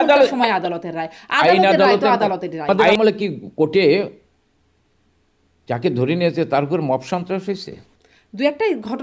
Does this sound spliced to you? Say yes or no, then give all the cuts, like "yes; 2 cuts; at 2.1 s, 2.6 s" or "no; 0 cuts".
yes; 1 cut; at 2.8 s